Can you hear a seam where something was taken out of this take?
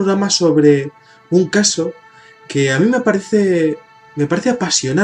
no; 0 cuts

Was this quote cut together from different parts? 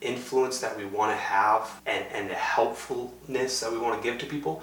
no; 0 cuts

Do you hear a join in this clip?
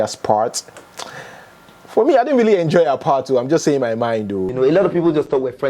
yes; 1 cut; at 4.5 s

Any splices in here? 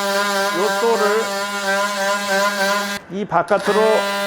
yes; 1 cut; at 3.0 s

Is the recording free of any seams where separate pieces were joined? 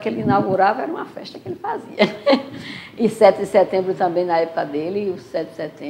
yes; 0 cuts

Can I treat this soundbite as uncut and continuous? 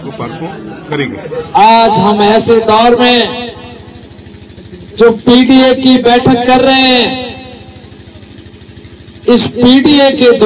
no; 1 cut; at 1.5 s

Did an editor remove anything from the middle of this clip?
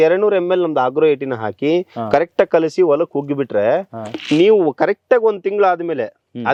no; 0 cuts

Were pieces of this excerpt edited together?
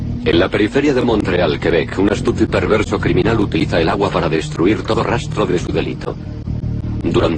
no; 0 cuts

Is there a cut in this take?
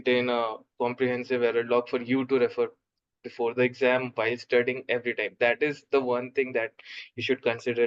no; 0 cuts

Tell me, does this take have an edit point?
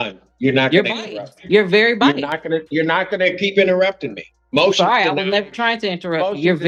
no; 0 cuts

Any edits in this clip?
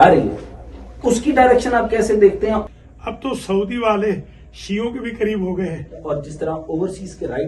yes; 2 cuts; at 2.6 s, 6.0 s

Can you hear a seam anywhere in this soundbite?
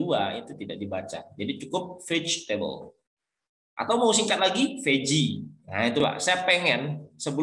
yes; 1 cut; at 6.0 s

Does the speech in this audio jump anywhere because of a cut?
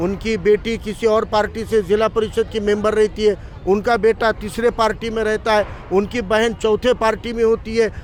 no; 0 cuts

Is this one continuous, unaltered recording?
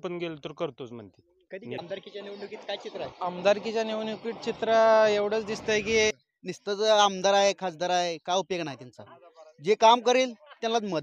no; 2 cuts; at 1.8 s, 6.3 s

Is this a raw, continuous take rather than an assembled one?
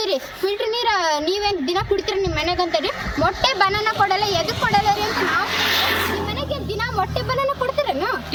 yes; 0 cuts

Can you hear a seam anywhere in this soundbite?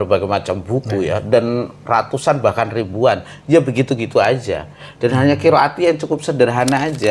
no; 0 cuts

